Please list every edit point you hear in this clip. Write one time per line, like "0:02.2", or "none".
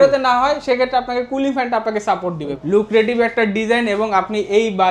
0:02.5